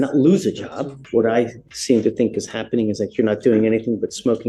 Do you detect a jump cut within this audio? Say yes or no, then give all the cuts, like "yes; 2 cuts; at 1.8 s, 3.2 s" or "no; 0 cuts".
yes; 1 cut; at 1.0 s